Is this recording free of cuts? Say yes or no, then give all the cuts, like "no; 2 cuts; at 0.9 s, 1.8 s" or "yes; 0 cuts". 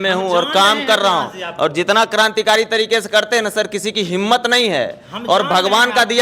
yes; 0 cuts